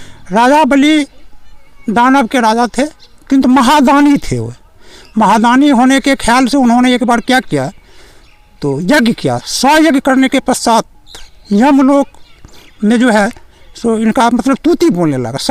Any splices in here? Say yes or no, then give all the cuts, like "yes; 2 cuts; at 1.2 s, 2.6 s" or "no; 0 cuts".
no; 0 cuts